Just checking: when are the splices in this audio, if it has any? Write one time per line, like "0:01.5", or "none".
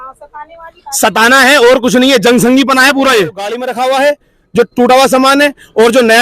0:03.6